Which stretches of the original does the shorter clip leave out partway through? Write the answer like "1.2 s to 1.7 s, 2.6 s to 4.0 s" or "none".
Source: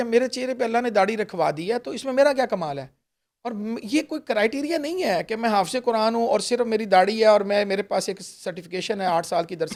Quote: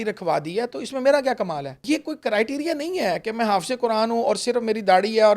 2.9 s to 3.8 s